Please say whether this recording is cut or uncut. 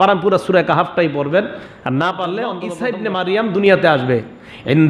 cut